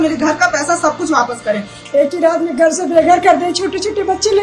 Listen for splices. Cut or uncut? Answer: cut